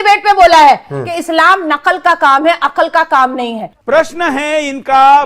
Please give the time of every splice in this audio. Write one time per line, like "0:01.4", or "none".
0:03.7